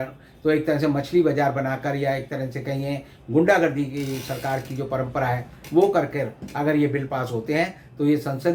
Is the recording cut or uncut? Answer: uncut